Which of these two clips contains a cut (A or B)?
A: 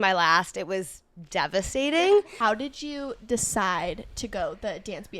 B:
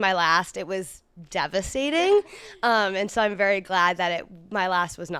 A